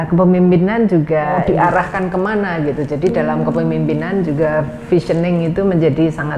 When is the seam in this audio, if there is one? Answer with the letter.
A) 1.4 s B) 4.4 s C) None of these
A